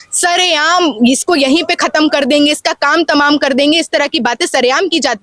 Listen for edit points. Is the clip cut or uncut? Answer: uncut